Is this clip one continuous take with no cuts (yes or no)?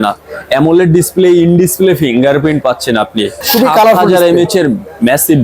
no